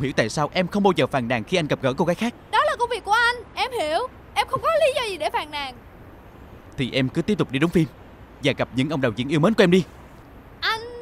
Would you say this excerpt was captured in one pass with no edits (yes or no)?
no